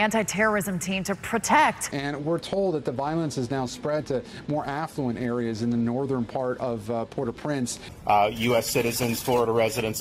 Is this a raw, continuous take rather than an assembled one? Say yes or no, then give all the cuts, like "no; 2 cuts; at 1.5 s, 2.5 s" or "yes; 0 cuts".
yes; 0 cuts